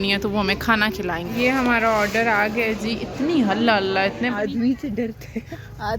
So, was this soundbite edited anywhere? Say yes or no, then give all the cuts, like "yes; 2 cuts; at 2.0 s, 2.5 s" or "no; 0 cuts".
yes; 2 cuts; at 1.3 s, 4.5 s